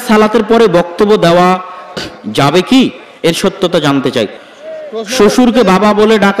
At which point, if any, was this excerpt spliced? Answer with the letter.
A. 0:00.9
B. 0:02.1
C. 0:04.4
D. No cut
C